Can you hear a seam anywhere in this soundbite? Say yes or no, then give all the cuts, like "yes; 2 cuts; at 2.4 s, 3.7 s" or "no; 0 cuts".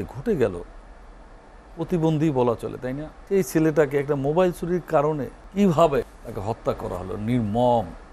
yes; 3 cuts; at 3.1 s, 5.4 s, 6.0 s